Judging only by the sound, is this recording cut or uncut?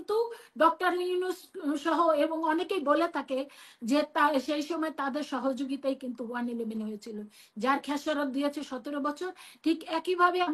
uncut